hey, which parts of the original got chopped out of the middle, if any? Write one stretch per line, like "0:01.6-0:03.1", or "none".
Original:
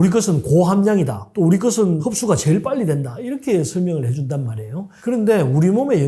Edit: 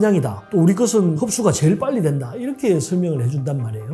none